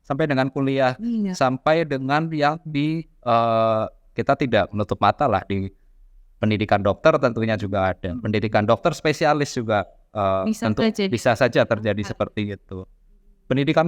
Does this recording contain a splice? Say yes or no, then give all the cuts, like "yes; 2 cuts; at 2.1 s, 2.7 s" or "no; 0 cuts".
no; 0 cuts